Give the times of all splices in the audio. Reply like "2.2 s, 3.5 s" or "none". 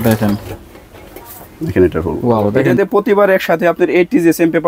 2.5 s